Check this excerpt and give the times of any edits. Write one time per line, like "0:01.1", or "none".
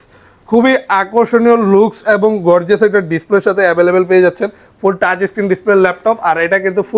none